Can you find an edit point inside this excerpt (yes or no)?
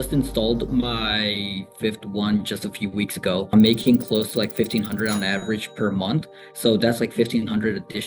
yes